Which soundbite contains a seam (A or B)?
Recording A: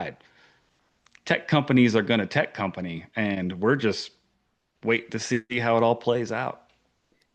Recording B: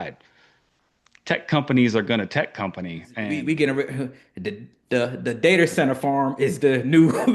B